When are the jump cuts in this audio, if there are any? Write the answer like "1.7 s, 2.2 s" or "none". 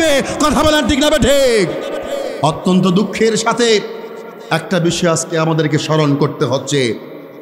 2.3 s